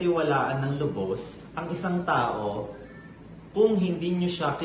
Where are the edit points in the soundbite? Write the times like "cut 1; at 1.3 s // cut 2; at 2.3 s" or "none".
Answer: none

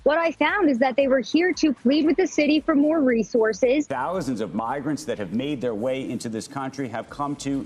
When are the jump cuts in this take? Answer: cut 1; at 4.0 s

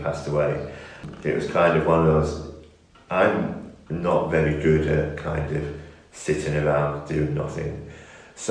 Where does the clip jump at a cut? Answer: cut 1; at 1.0 s

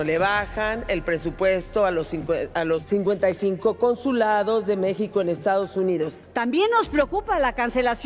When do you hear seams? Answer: cut 1; at 2.8 s // cut 2; at 6.2 s

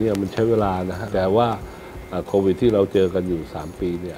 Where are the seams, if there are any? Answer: cut 1; at 1.0 s

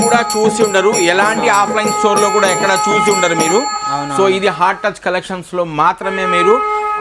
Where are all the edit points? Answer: none

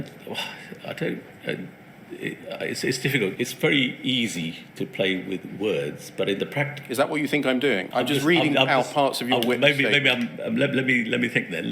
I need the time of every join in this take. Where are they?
cut 1; at 3.3 s // cut 2; at 7.8 s

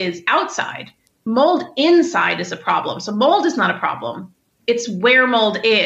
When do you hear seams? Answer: none

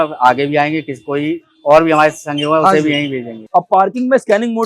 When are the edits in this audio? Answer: cut 1; at 3.4 s

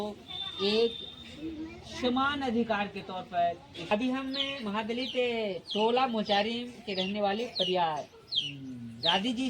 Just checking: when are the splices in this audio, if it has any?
cut 1; at 3.9 s

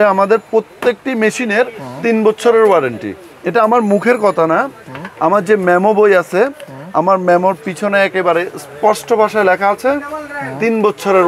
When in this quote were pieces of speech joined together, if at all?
none

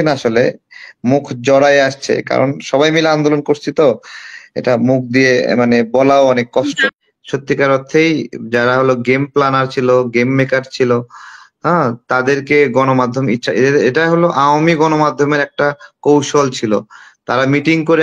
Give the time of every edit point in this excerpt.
cut 1; at 6.9 s

